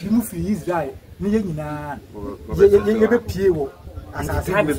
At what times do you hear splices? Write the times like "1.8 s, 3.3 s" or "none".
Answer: none